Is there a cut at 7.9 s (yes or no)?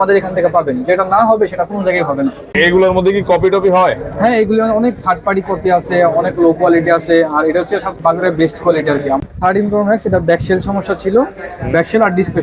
no